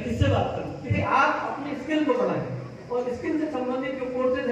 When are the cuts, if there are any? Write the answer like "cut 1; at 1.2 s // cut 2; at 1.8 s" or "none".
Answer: cut 1; at 1.0 s